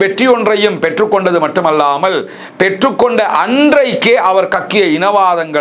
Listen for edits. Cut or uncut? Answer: uncut